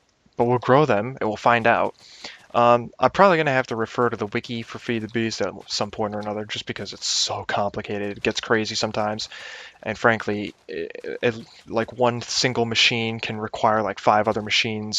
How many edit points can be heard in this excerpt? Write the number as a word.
one